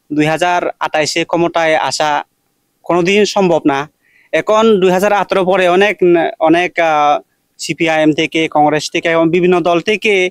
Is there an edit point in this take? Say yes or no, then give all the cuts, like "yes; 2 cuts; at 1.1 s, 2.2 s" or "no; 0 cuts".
no; 0 cuts